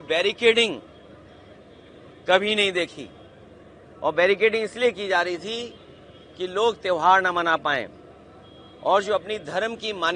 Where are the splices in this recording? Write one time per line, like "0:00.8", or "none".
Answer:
none